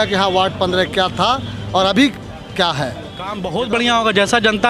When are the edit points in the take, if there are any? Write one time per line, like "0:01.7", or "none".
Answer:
0:03.4